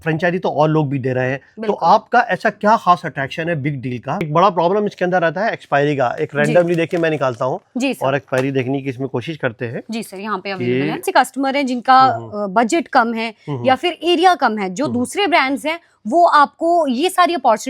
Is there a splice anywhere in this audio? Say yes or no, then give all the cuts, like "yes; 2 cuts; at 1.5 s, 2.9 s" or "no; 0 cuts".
yes; 2 cuts; at 4.3 s, 11.0 s